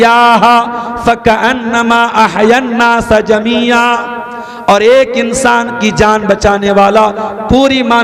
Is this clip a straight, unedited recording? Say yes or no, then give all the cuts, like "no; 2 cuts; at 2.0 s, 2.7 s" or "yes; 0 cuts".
yes; 0 cuts